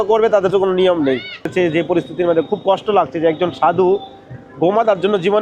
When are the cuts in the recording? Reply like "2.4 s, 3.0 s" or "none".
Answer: 1.5 s